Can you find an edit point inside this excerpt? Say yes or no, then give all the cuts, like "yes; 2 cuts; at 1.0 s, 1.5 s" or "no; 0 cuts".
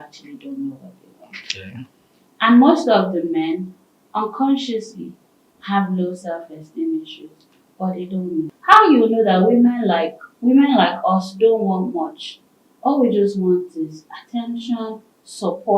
yes; 1 cut; at 8.5 s